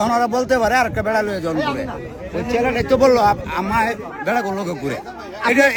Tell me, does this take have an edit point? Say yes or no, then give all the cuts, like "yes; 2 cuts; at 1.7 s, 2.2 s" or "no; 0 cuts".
no; 0 cuts